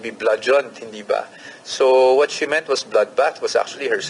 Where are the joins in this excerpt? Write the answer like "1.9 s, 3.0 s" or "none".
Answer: none